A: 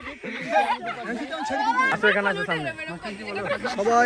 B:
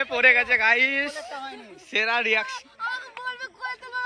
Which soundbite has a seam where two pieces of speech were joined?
A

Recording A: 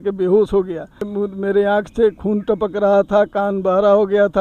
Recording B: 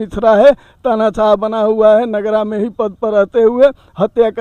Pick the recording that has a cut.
A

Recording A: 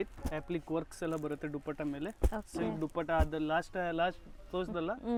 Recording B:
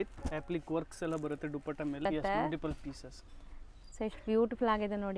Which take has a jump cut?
B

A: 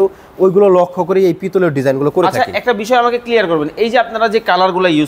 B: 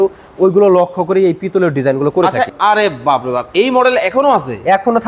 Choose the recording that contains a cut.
B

